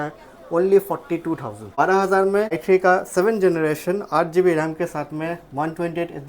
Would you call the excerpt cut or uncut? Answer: cut